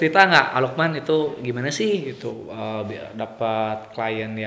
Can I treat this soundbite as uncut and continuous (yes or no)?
yes